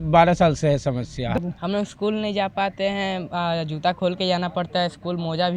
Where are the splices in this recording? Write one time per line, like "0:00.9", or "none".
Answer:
0:01.4